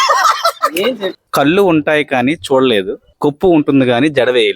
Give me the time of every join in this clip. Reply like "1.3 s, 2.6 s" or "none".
1.1 s, 3.0 s